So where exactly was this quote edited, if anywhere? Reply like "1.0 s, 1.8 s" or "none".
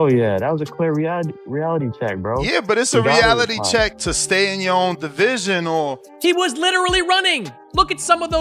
6.1 s